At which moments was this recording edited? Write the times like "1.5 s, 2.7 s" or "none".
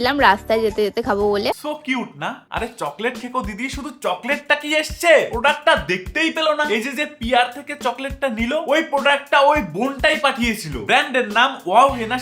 none